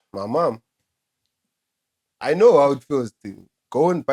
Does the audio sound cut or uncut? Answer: uncut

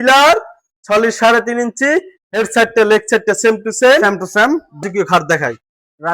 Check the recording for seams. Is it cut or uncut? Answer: cut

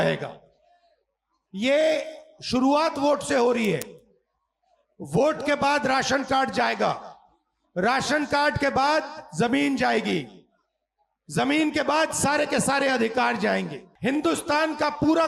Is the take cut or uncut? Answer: cut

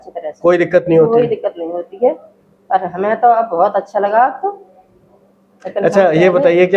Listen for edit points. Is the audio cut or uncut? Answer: uncut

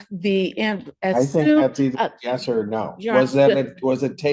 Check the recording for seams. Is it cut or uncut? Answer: uncut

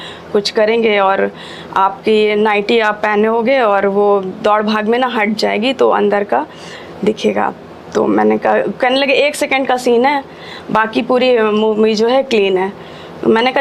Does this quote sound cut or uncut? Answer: uncut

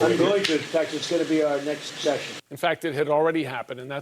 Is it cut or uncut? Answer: cut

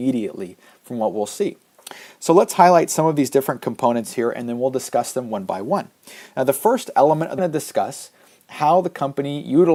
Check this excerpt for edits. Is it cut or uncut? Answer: uncut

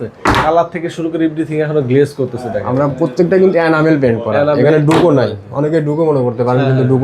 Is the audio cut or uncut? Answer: uncut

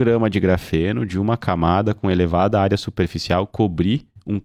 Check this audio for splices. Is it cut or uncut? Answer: uncut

